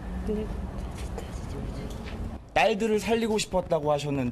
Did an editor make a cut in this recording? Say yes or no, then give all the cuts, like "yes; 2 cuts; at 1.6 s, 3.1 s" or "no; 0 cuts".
yes; 1 cut; at 1.4 s